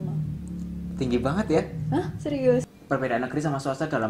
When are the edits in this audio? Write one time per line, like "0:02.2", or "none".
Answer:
0:02.7